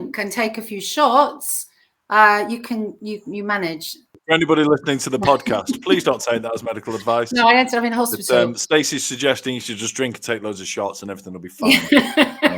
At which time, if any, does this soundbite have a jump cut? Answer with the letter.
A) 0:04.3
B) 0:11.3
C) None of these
A